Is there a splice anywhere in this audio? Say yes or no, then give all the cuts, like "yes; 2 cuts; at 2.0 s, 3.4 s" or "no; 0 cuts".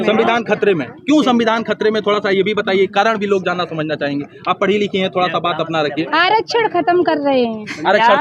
no; 0 cuts